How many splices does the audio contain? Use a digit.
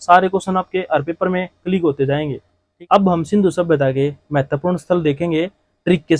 1